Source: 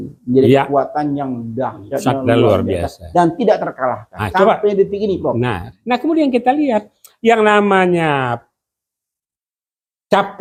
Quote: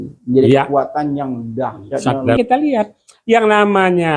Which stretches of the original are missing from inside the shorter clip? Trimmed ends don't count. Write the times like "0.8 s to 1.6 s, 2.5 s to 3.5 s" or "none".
2.4 s to 6.3 s